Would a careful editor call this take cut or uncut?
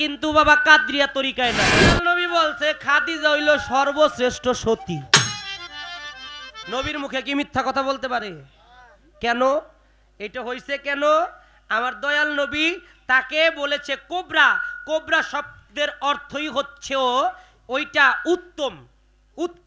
cut